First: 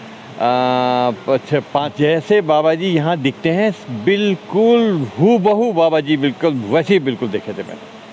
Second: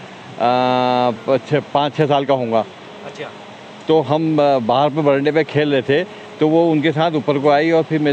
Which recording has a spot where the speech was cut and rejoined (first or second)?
first